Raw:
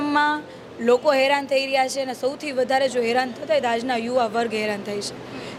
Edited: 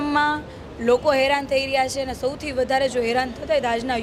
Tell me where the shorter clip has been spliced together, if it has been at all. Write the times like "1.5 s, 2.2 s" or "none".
none